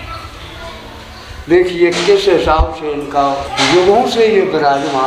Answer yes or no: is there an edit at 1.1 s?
no